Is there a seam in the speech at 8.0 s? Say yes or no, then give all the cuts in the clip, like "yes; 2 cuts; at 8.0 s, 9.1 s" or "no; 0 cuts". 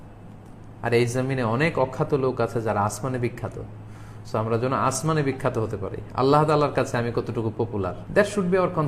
yes; 1 cut; at 8.0 s